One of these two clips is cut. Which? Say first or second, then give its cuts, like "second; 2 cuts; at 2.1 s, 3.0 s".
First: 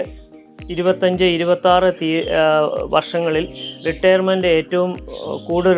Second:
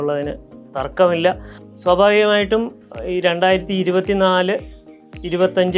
second; 1 cut; at 1.5 s